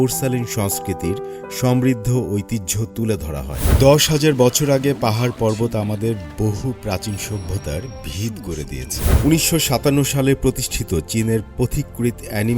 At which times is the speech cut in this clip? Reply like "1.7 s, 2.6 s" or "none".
3.6 s, 9.2 s